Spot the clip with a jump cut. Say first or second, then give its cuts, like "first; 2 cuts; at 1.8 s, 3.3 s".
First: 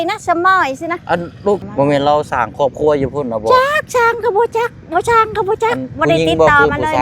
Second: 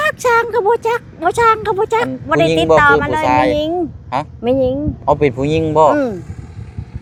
first; 1 cut; at 1.6 s